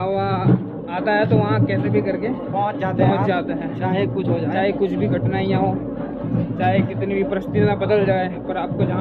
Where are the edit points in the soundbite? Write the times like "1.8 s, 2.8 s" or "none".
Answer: none